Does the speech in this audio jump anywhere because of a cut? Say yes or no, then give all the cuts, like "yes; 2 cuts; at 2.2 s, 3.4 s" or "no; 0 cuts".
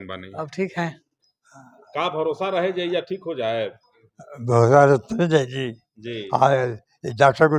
yes; 1 cut; at 1.1 s